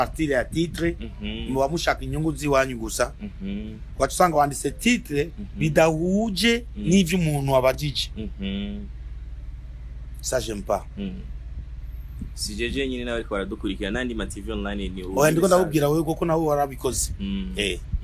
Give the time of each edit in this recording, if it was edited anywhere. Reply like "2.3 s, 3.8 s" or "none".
none